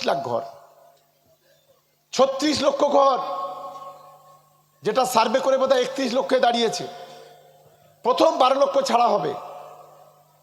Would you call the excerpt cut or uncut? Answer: uncut